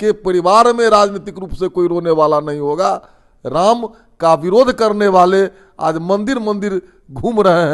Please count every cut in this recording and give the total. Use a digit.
0